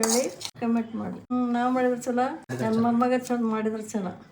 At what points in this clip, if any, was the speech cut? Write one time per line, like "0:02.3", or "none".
0:01.2